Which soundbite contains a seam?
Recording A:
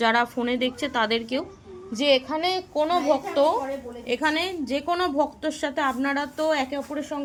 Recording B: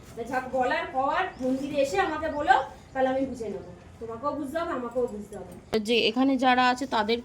B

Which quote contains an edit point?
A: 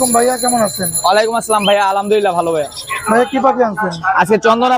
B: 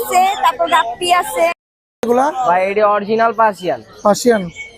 B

